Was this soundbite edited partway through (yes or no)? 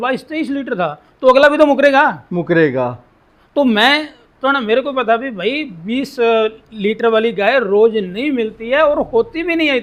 no